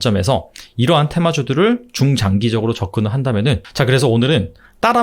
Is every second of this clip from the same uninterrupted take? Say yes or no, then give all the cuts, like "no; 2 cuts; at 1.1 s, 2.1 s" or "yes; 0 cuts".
no; 1 cut; at 3.7 s